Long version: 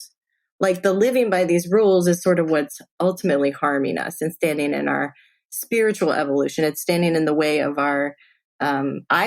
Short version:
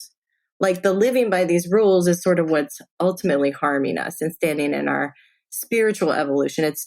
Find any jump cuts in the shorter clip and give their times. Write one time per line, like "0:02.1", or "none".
none